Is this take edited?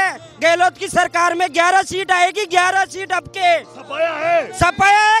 no; 0 cuts

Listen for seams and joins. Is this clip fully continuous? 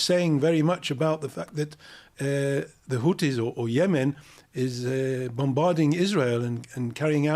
yes; 0 cuts

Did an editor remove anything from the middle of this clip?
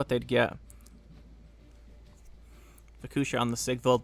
no; 0 cuts

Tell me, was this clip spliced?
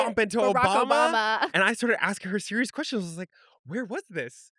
yes; 1 cut; at 1.5 s

